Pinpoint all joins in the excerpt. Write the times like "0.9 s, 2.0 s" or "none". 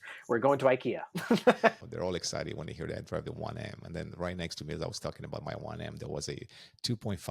1.8 s